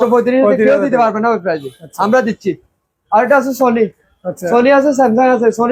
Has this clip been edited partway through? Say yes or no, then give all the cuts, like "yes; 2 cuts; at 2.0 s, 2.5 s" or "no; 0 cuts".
no; 0 cuts